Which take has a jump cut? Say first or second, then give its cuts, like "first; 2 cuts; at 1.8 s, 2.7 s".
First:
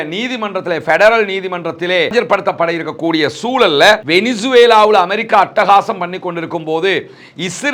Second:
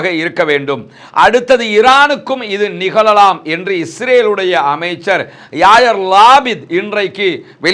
first; 1 cut; at 4.0 s